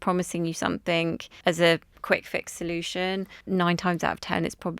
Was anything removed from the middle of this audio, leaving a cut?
yes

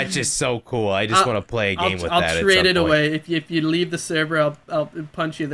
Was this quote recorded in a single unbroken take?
yes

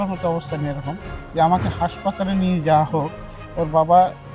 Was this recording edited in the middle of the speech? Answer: no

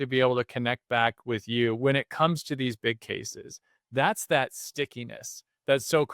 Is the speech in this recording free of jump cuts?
yes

